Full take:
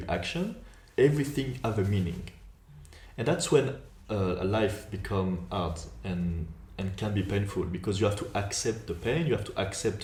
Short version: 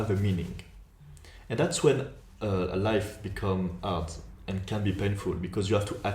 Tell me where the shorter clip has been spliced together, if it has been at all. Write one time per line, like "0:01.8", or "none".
0:04.2